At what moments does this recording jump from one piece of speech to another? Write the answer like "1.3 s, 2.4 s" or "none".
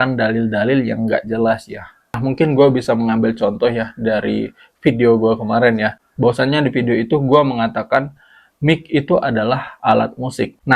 2.2 s